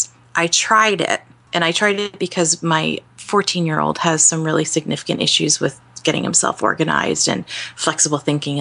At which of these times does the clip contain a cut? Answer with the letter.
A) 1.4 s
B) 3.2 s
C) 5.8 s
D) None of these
D